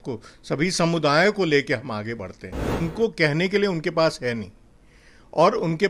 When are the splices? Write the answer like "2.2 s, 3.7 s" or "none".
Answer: 2.8 s